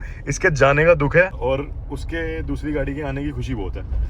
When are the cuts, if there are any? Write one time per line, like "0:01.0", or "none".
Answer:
0:01.4

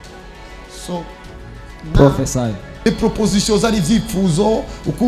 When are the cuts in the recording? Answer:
0:02.9

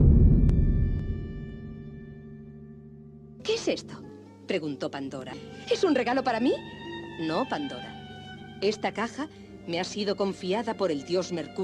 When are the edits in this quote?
0:03.7

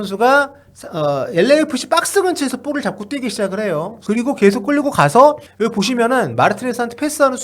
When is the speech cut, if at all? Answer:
0:04.0
0:05.5

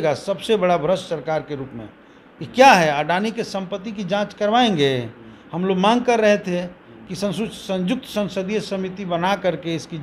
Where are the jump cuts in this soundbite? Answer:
none

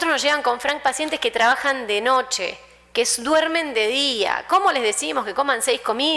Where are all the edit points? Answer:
0:02.0

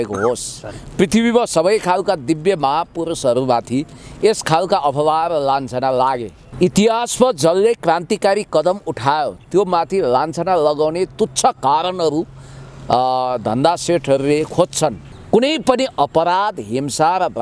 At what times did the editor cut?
0:15.1

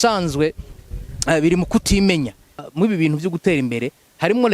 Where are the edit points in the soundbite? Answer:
0:02.6

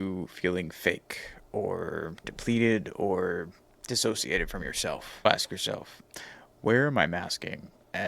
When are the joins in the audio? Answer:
0:05.2

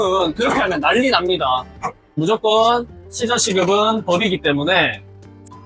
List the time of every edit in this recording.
0:02.2

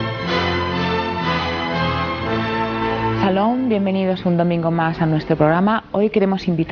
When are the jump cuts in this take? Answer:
0:01.4

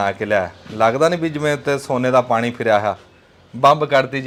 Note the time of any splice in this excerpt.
none

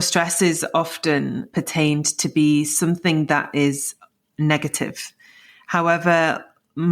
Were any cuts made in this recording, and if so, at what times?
0:01.5

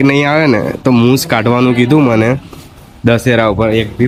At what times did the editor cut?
none

